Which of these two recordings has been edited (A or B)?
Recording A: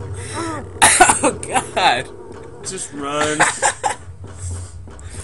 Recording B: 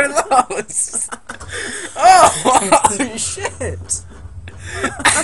B